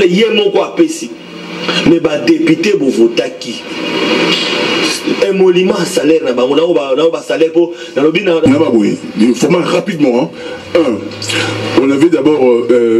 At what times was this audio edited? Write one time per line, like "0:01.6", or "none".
0:08.5